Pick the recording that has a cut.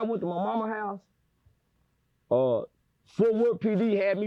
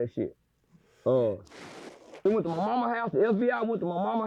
second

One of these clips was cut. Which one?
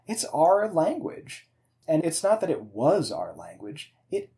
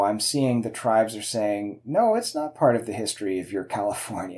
first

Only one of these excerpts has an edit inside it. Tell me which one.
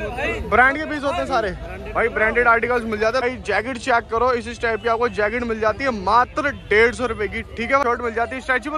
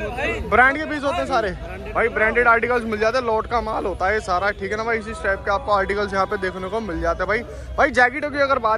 first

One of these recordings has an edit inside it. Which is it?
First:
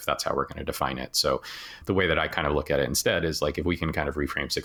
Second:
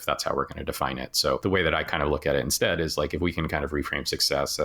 second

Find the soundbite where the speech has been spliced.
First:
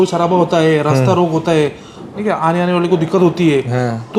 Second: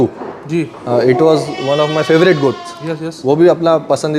first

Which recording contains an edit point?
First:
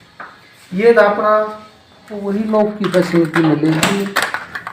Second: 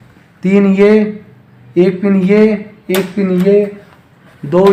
first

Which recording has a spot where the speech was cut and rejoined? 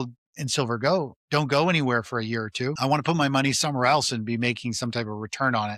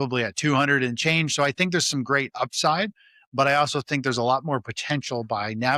first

